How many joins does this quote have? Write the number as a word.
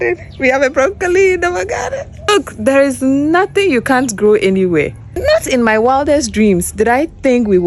two